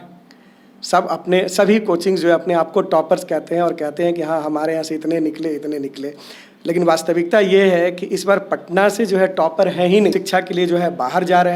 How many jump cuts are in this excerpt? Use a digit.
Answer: 0